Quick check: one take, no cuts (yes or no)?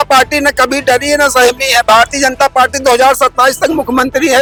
yes